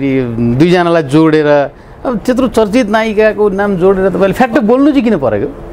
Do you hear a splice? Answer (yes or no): no